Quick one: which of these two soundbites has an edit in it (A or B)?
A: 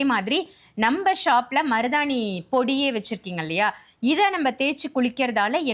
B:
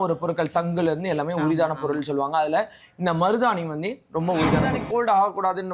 B